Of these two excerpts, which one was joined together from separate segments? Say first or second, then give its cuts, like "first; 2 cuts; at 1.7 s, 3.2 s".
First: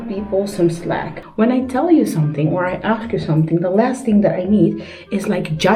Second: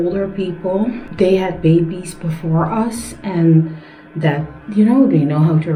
first; 1 cut; at 1.1 s